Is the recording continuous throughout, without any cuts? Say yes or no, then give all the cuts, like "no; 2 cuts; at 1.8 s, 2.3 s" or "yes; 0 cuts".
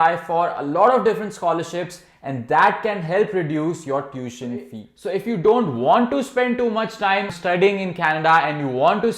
no; 2 cuts; at 4.9 s, 7.3 s